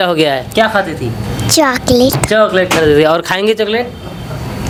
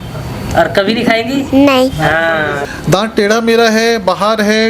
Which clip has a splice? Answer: second; 1 cut; at 2.6 s

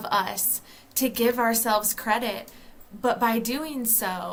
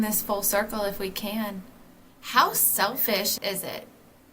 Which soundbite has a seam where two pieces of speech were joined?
second; 1 cut; at 3.4 s

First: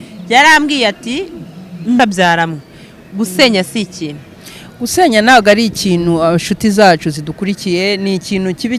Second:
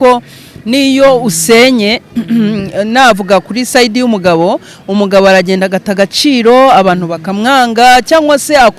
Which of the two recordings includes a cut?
first; 1 cut; at 2.0 s

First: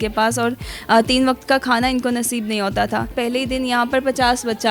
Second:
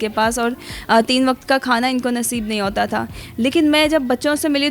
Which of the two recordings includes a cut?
first; 1 cut; at 3.1 s

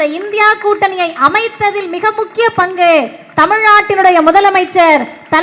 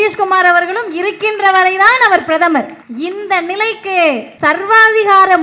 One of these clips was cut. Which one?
second; 2 cuts; at 2.8 s, 4.3 s

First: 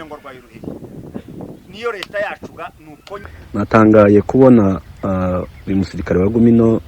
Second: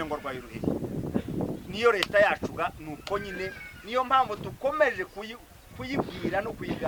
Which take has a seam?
first; 1 cut; at 3.3 s

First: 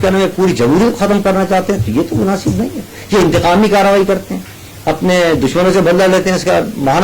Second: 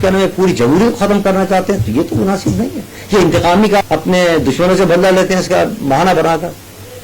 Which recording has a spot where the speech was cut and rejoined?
second; 1 cut; at 3.8 s

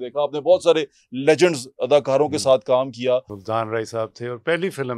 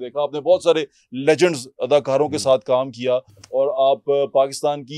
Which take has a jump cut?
first; 1 cut; at 3.3 s

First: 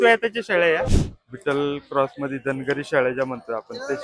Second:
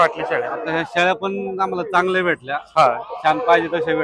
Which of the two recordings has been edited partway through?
first; 1 cut; at 0.9 s

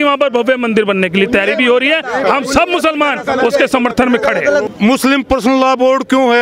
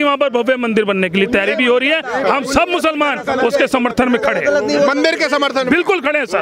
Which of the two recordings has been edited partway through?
first; 1 cut; at 4.7 s

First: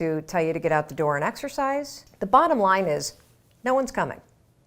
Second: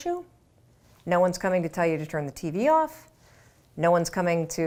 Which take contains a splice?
first; 1 cut; at 2.0 s

